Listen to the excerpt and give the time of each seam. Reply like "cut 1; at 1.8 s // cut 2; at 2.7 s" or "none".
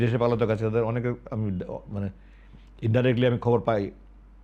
none